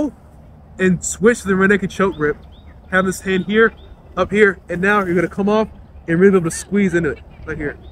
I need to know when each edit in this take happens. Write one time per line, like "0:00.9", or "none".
none